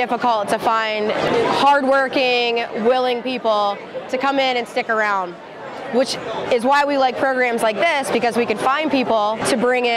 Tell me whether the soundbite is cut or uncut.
cut